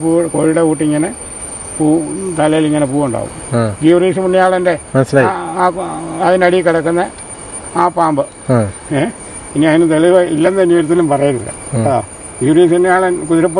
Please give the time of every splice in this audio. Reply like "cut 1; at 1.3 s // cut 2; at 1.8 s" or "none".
none

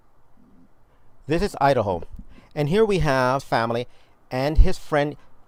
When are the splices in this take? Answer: none

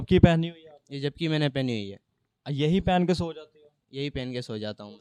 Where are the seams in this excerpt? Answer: none

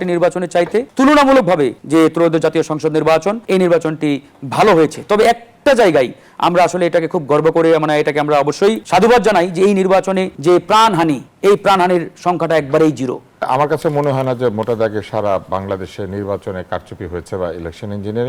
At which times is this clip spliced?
cut 1; at 0.9 s // cut 2; at 1.8 s // cut 3; at 3.4 s // cut 4; at 8.8 s // cut 5; at 10.3 s // cut 6; at 11.3 s // cut 7; at 13.5 s

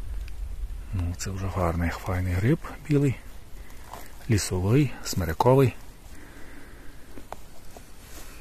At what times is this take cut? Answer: none

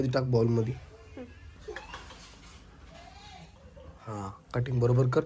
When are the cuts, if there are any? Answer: cut 1; at 1.5 s

